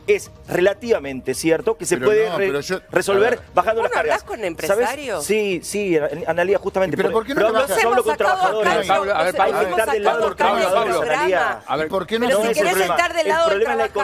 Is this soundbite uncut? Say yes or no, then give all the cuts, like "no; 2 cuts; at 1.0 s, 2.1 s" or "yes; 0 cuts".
yes; 0 cuts